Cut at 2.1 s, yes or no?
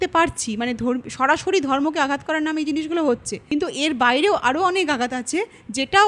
no